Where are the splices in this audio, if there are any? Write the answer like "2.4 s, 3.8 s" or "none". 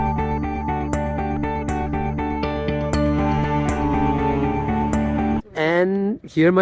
5.4 s